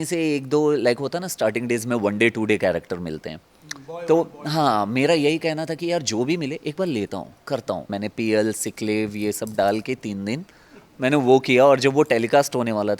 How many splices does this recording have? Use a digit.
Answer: 1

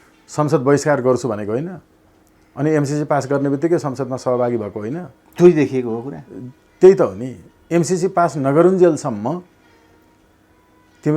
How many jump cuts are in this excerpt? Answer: 0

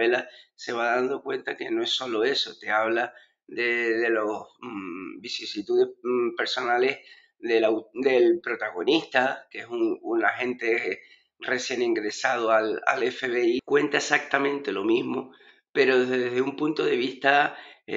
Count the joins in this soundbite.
1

